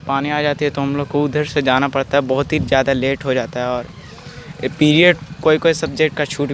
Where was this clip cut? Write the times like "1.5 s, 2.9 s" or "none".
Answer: none